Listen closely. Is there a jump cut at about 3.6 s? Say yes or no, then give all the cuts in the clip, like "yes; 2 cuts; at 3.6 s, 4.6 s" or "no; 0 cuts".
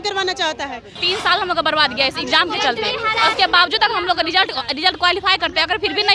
no; 1 cut; at 1.0 s